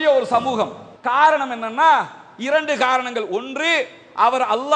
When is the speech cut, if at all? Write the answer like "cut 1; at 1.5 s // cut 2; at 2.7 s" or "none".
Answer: cut 1; at 1.0 s